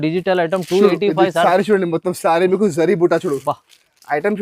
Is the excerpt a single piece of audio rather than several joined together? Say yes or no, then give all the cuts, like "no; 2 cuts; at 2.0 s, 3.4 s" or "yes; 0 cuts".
yes; 0 cuts